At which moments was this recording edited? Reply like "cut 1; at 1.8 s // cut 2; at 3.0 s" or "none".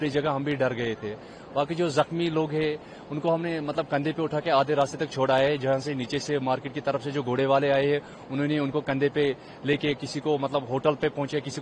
none